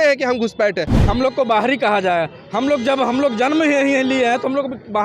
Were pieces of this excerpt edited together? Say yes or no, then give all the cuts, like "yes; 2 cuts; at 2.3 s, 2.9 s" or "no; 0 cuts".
yes; 1 cut; at 0.9 s